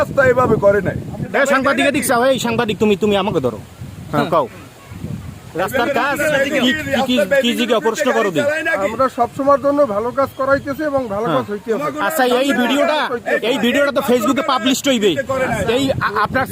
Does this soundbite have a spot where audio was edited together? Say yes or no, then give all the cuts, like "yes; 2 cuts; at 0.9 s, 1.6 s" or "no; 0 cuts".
yes; 1 cut; at 1.3 s